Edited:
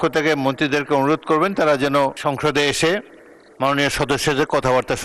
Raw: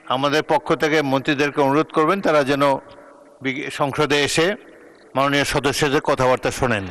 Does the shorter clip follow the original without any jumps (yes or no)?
no